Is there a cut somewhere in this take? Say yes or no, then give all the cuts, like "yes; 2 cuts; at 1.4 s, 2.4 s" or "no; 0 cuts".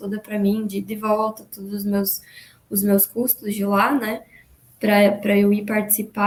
no; 0 cuts